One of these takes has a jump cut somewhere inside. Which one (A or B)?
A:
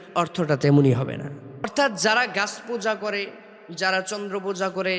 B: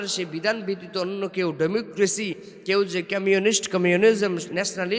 A